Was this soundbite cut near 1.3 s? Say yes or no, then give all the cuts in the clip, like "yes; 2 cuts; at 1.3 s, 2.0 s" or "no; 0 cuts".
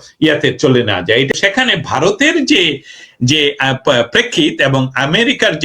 yes; 1 cut; at 1.3 s